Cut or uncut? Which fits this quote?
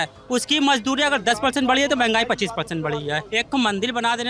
cut